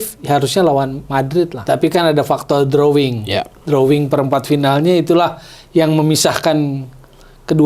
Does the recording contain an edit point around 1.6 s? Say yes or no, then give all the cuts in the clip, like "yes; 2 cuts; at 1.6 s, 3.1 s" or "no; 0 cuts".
yes; 1 cut; at 1.6 s